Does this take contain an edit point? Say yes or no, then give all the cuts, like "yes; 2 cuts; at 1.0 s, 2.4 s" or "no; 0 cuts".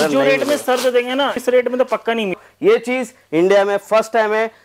yes; 2 cuts; at 1.4 s, 2.4 s